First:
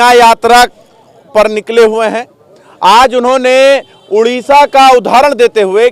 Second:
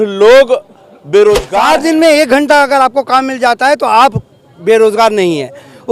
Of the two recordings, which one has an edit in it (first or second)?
second